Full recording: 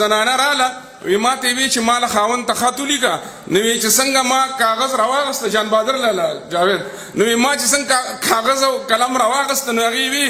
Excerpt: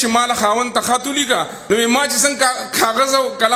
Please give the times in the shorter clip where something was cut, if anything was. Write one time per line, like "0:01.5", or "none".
0:01.6